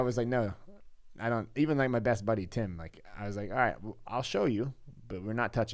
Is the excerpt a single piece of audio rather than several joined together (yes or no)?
yes